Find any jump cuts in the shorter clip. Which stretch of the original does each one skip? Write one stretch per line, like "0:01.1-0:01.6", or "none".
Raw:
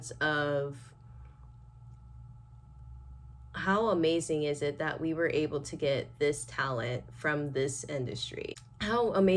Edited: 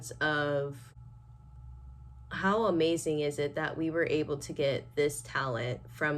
0:00.9-0:02.2